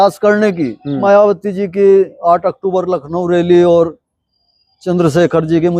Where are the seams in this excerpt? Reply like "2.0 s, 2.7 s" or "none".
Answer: 1.0 s

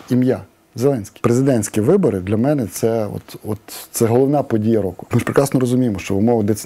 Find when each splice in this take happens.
1.1 s, 5.0 s

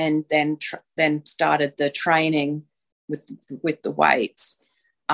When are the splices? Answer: none

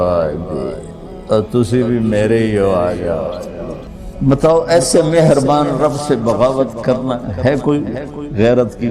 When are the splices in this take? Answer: 4.0 s

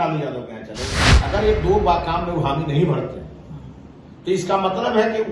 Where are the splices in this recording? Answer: 1.0 s

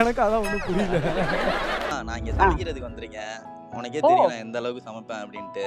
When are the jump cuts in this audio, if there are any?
1.9 s

